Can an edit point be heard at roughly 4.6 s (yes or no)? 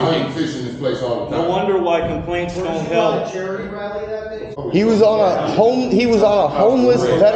yes